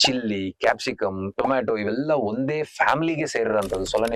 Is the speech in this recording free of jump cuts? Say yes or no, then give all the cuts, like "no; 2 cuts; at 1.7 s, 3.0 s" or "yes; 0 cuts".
yes; 0 cuts